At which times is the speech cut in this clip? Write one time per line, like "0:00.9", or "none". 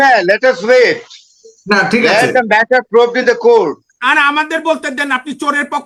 none